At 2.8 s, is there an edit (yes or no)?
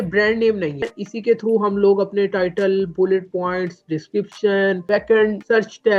no